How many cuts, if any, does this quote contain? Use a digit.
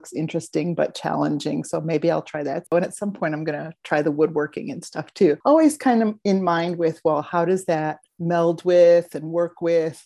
3